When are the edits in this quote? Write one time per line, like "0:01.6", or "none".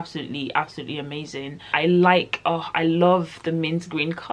0:01.7

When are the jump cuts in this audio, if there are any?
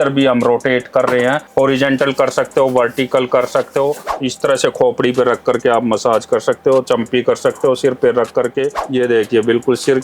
0:04.2
0:08.8

